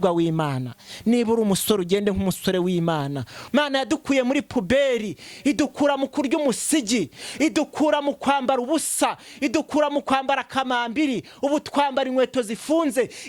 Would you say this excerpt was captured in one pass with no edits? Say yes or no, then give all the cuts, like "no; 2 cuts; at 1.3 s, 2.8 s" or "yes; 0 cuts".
no; 1 cut; at 3.4 s